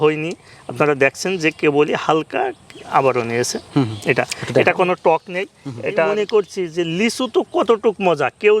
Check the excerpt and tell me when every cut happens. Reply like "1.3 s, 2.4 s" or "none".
6.1 s